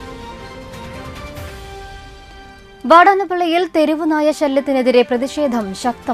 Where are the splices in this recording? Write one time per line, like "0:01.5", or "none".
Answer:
0:01.0